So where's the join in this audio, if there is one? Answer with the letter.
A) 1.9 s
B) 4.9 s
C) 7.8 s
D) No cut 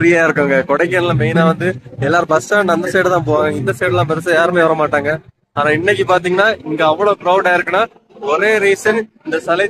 D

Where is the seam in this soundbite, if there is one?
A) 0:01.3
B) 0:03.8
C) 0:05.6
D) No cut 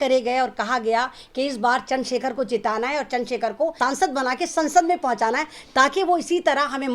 B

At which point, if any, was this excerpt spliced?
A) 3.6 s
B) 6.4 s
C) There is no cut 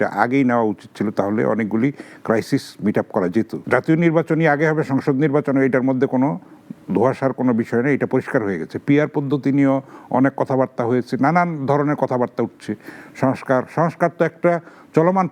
A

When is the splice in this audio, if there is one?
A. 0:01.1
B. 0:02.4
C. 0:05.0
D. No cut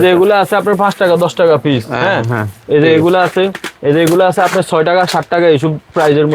D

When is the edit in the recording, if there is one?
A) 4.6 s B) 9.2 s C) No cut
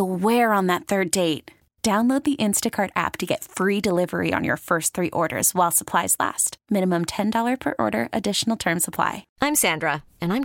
B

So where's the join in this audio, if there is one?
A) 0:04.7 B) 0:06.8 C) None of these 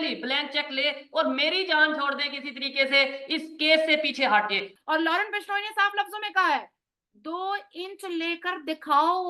A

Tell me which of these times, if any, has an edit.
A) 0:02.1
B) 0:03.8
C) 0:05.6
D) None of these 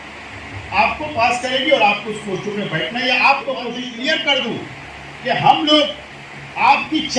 B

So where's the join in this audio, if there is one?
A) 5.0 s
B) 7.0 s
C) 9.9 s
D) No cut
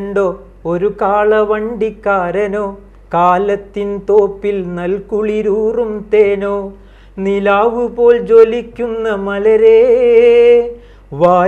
D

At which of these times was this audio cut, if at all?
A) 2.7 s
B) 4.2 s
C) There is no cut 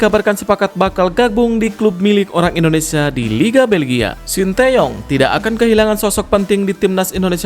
B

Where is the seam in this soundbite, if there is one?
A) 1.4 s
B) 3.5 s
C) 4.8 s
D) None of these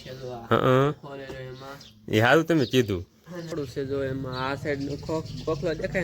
B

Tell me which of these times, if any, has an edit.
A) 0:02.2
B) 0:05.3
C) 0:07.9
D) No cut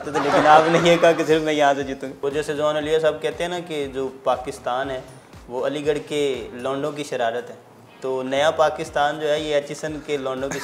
A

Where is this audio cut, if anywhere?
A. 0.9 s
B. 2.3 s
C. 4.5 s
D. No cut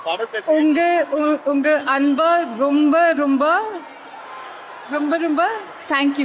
D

